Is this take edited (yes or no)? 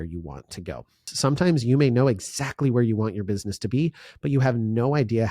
yes